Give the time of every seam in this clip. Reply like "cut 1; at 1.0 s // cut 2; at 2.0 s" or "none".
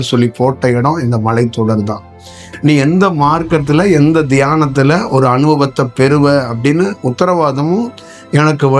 cut 1; at 2.4 s